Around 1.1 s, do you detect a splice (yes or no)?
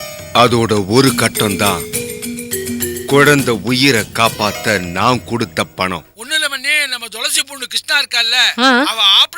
no